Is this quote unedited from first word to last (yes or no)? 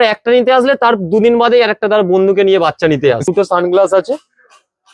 no